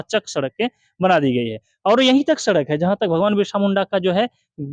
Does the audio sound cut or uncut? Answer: uncut